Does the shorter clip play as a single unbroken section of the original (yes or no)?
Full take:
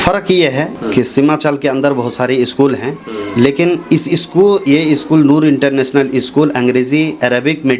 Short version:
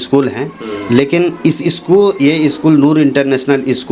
yes